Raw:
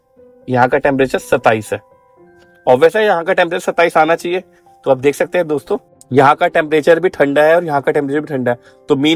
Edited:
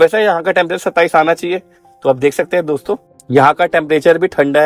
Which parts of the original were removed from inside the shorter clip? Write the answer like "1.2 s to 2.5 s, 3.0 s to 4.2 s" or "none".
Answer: none